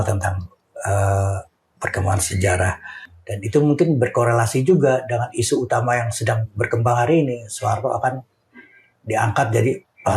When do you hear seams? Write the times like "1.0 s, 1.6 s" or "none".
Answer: 3.1 s